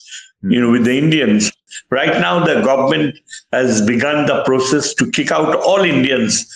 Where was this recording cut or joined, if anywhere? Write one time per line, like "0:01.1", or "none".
0:01.7